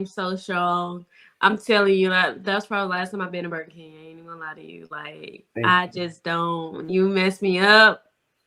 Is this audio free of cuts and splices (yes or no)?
yes